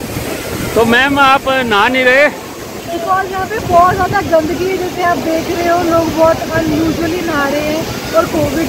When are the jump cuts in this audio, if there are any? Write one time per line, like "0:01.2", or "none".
none

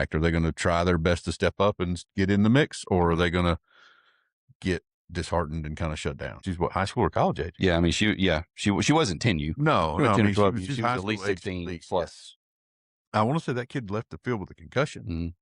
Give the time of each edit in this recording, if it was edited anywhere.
0:06.4

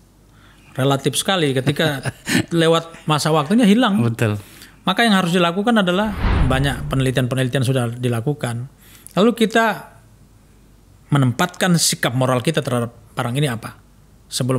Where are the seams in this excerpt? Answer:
0:06.3

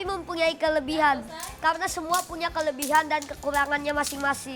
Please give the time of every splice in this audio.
none

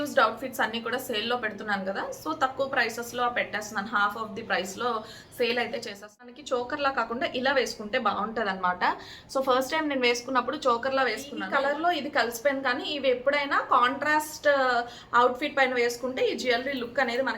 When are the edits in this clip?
0:06.3
0:11.3

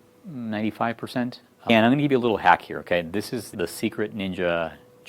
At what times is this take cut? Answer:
0:01.7

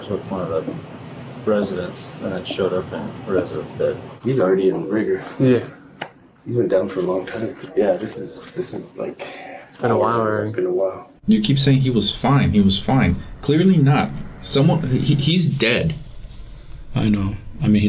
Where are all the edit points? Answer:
0:04.1
0:07.5
0:11.1

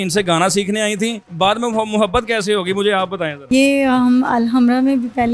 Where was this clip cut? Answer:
0:01.2
0:03.4

